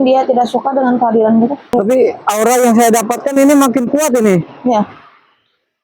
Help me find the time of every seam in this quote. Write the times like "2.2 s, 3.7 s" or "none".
1.7 s